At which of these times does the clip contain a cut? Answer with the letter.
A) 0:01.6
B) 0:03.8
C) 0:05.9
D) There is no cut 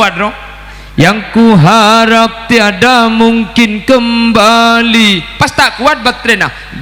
D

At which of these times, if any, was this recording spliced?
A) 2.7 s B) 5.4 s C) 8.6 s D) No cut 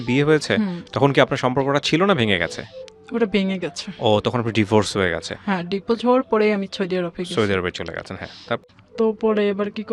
C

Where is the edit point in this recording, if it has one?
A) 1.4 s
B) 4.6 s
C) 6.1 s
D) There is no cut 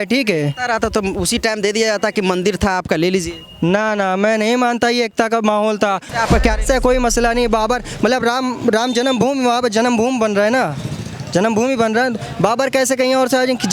C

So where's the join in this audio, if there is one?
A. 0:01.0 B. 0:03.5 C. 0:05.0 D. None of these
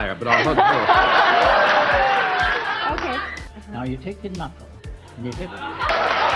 B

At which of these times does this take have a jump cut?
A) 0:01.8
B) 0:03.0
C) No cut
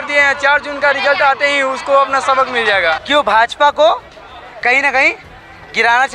B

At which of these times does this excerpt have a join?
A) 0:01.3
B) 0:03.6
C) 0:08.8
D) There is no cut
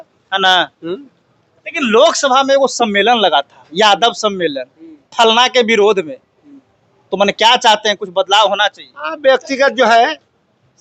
D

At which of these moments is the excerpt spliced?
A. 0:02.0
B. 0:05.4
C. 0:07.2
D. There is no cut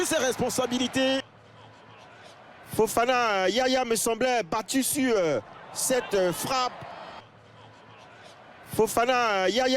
C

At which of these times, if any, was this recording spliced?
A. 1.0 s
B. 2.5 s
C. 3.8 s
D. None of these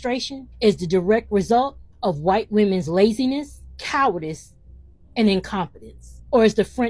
D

